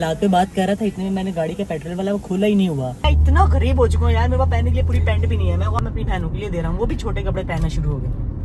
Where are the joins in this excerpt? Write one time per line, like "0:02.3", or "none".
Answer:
0:03.1
0:05.8